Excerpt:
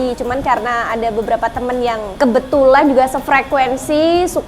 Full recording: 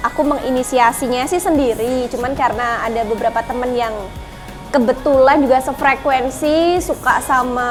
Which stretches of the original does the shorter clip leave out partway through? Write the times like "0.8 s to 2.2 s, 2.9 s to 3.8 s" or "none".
4.0 s to 4.6 s